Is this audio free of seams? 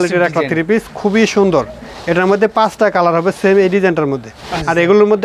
yes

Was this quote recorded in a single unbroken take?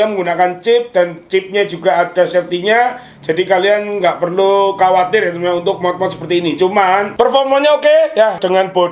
no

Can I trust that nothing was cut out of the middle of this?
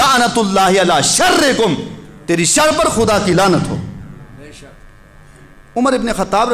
yes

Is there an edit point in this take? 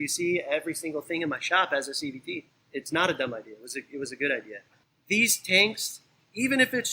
yes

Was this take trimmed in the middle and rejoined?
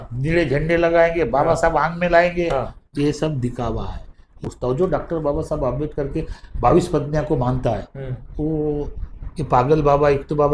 yes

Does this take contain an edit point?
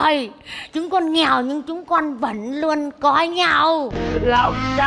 yes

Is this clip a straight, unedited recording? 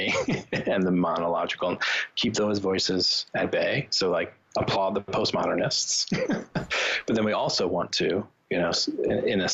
yes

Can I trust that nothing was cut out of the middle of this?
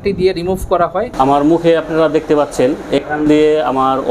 no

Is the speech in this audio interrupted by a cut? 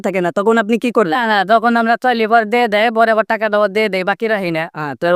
no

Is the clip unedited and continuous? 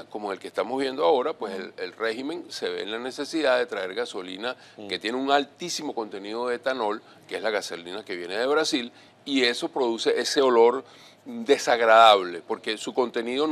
no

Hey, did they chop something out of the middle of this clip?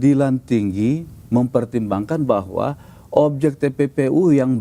no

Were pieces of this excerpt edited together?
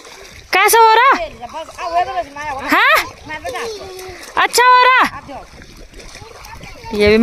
no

